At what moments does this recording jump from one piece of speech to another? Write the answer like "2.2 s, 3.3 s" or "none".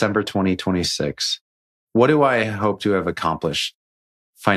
1.8 s